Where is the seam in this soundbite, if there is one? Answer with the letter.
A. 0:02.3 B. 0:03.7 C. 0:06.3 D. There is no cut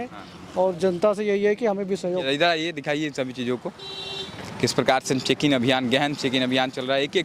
A